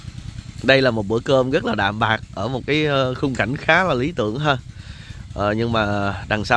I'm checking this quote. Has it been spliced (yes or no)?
no